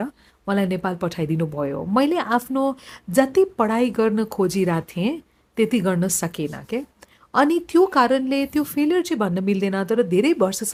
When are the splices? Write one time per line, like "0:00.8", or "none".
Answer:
none